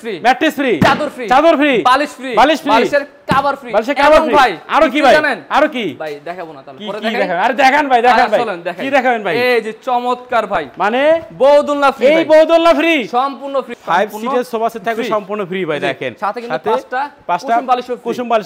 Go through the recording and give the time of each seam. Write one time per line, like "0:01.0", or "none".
0:13.7